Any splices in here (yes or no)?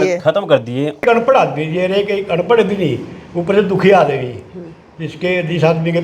yes